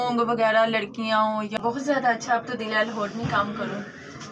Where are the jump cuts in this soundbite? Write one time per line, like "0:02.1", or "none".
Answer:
0:01.6